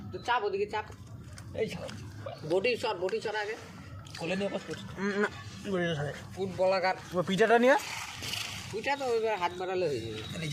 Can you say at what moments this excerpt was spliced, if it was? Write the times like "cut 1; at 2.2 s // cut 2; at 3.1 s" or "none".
none